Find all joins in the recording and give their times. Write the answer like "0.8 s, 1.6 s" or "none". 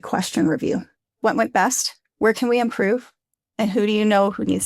1.1 s